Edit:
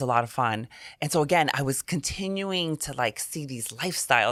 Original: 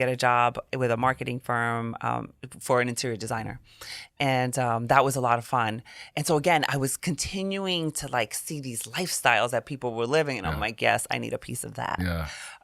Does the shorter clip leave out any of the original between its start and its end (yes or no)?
no